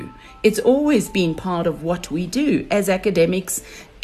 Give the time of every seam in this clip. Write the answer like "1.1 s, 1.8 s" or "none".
none